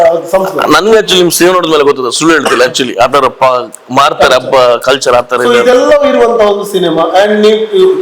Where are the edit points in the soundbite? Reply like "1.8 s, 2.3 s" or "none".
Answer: none